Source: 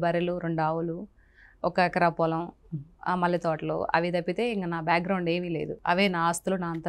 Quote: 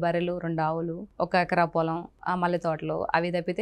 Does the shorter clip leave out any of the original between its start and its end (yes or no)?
yes